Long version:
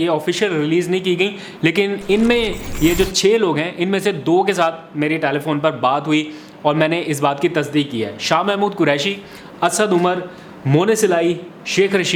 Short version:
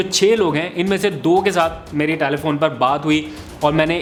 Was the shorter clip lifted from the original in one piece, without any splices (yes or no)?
yes